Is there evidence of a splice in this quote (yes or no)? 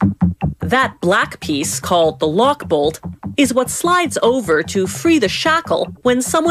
yes